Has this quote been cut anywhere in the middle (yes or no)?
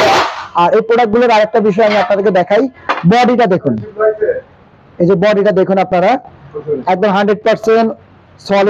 no